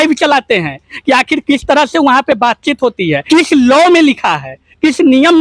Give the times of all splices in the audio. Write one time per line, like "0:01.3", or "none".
0:03.2